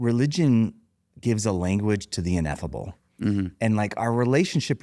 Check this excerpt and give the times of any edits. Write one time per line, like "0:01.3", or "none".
none